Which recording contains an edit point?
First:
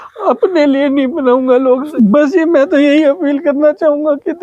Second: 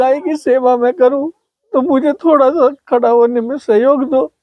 first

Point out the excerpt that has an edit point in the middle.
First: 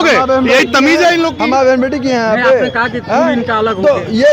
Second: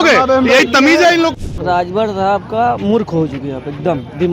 second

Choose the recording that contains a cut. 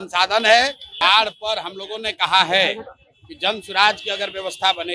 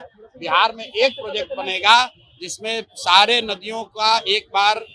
first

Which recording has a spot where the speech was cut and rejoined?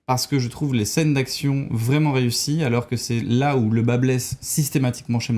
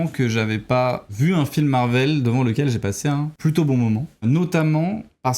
second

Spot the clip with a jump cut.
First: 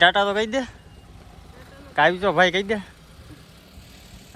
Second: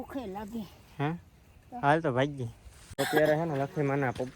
second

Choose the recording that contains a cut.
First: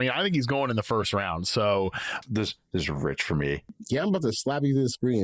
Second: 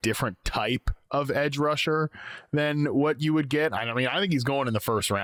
first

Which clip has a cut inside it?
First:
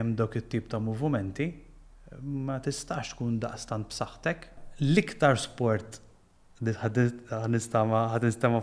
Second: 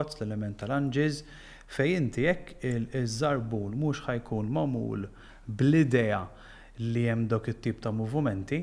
first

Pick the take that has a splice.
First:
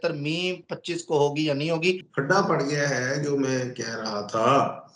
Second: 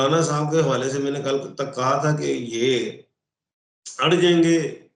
first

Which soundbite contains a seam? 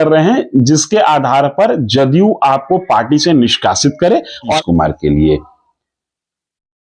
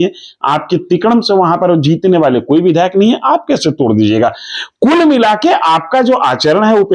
first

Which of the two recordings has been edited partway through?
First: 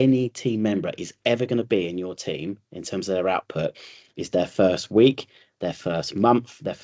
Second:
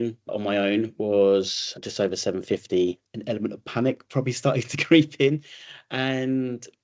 second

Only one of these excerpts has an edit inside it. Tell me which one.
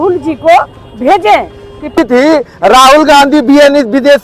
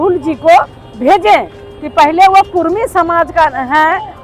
first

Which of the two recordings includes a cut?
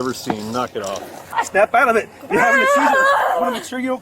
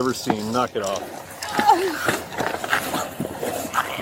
first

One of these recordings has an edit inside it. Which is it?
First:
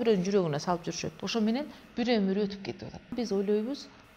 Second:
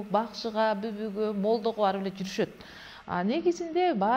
first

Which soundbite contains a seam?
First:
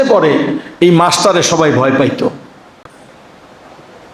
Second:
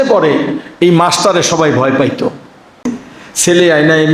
second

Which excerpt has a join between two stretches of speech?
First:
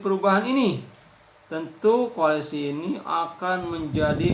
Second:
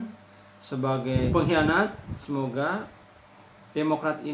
second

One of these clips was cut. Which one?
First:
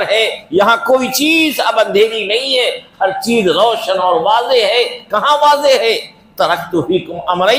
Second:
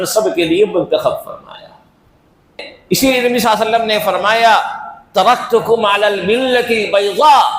second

